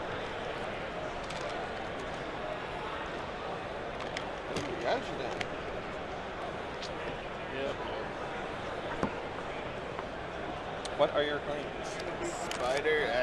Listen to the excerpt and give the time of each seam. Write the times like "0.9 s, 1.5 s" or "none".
none